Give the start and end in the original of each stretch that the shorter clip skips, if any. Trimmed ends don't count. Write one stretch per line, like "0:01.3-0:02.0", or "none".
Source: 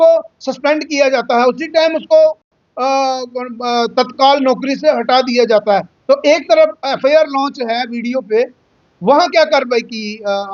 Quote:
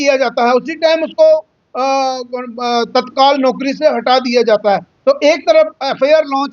0:02.5-0:02.6